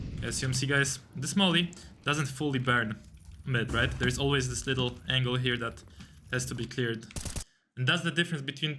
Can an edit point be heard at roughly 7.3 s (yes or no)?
yes